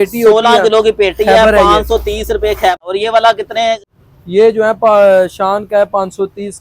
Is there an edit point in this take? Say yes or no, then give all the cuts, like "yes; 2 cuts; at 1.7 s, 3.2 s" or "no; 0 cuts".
yes; 2 cuts; at 2.8 s, 3.9 s